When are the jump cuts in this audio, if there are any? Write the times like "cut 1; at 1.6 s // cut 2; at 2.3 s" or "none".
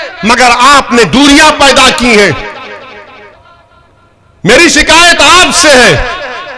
cut 1; at 3.3 s